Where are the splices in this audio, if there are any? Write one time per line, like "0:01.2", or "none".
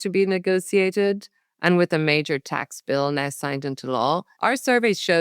0:04.3